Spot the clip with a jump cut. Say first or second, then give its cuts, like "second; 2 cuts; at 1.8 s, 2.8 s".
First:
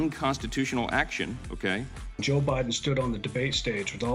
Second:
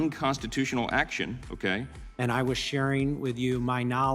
second; 1 cut; at 2.1 s